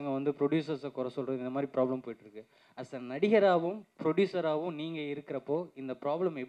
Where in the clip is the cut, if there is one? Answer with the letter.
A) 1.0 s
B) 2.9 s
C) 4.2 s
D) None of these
D